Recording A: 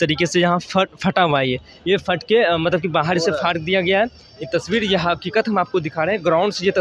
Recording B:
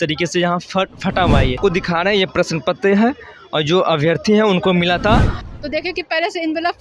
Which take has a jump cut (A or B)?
B